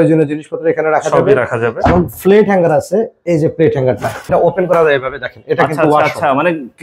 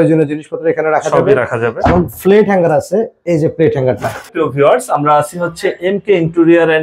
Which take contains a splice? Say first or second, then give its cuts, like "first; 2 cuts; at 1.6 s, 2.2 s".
first; 1 cut; at 4.3 s